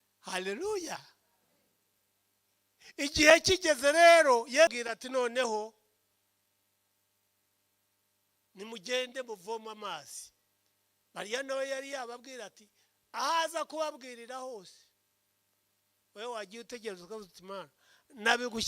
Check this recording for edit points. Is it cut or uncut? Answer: cut